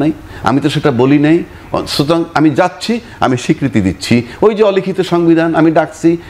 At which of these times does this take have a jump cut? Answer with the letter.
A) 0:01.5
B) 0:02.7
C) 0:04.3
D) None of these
D